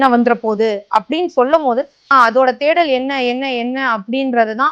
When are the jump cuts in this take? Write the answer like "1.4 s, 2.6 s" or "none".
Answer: 2.1 s